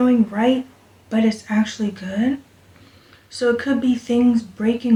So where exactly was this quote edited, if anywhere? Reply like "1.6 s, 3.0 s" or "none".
none